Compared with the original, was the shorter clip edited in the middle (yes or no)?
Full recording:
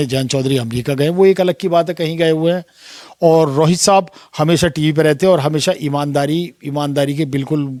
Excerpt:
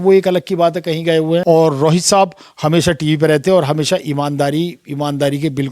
yes